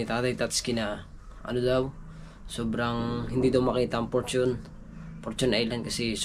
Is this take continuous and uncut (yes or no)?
yes